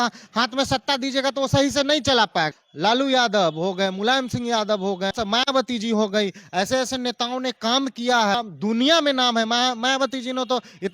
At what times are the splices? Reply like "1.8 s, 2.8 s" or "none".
2.6 s, 5.1 s, 8.3 s